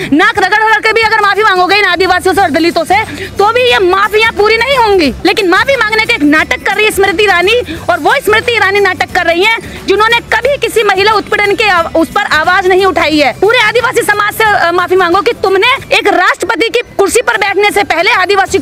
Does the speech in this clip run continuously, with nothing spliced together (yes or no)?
no